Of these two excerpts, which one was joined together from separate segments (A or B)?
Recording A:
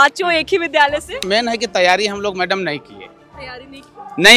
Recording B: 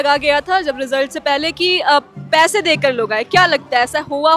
A